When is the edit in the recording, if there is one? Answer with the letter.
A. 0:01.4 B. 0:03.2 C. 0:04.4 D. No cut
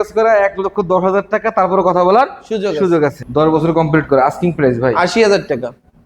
B